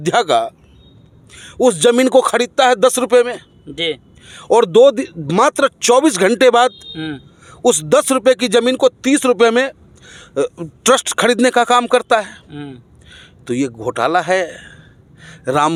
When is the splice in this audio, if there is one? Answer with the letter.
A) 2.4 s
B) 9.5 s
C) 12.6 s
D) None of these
D